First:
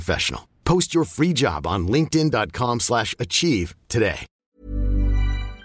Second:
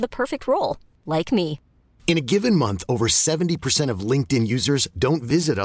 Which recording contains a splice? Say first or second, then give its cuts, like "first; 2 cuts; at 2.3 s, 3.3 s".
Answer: first; 1 cut; at 4.3 s